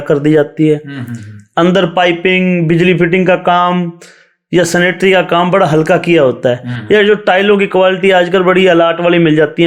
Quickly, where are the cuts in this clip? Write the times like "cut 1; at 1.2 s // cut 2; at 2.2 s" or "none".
none